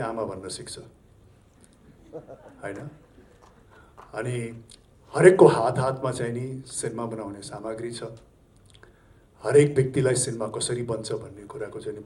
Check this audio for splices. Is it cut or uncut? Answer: uncut